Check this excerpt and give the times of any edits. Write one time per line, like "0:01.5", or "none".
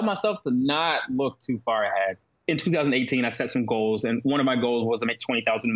0:02.3